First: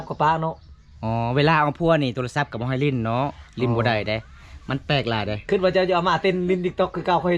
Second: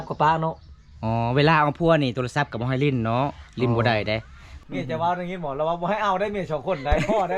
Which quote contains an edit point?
second; 1 cut; at 4.5 s

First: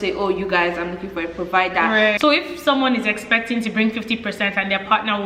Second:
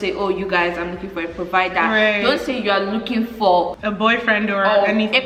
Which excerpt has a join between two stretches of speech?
first; 1 cut; at 2.2 s

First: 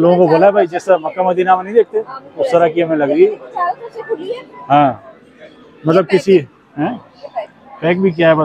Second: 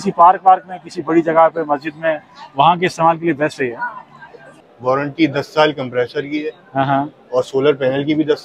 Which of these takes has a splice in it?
second; 1 cut; at 4.5 s

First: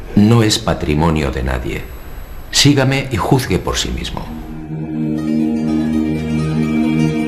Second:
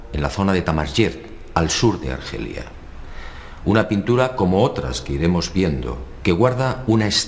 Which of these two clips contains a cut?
second; 1 cut; at 4.3 s

